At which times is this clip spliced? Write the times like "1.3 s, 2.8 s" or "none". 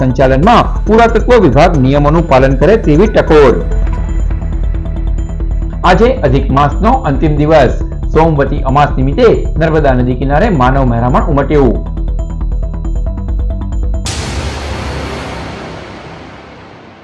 14.0 s